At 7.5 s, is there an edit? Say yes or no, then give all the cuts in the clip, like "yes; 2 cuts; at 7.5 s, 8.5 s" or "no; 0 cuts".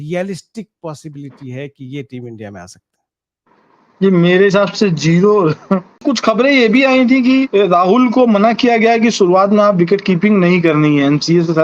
yes; 2 cuts; at 6.0 s, 7.5 s